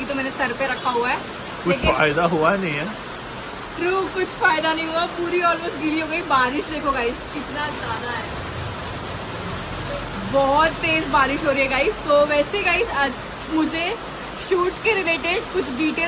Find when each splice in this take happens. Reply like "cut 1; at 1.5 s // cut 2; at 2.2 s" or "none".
none